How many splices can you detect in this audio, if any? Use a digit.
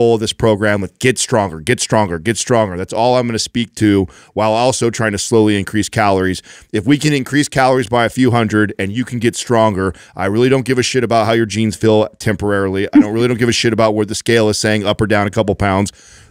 0